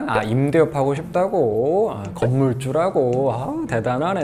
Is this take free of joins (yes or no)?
yes